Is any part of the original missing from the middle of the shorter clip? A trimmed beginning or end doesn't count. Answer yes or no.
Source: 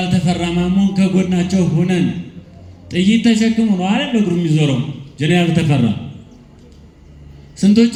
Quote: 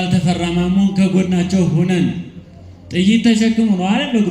no